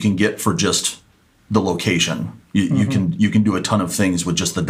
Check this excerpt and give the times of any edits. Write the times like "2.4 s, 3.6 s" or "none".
none